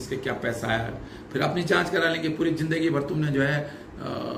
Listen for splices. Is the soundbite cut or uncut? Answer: uncut